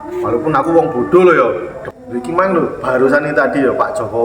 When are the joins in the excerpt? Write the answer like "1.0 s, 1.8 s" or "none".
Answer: 1.8 s